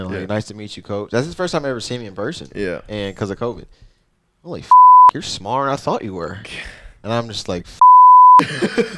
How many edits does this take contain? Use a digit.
0